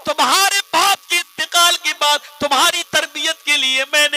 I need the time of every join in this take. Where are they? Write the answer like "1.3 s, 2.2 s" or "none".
none